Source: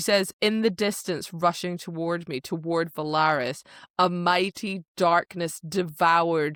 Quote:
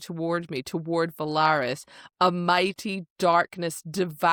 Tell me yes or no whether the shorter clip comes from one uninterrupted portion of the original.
yes